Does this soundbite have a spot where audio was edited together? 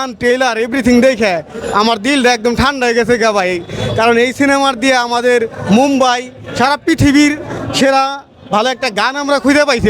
no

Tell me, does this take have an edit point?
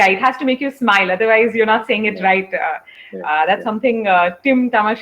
no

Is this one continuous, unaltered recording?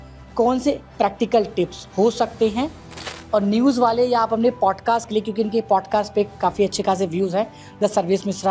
yes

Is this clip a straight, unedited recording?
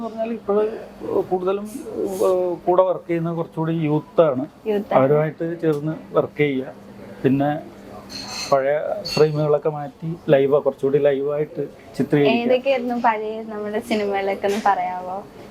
yes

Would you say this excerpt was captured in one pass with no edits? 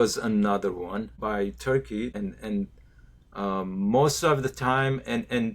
no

